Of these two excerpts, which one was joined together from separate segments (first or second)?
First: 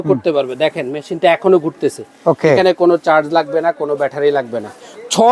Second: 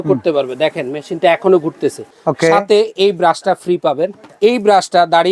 second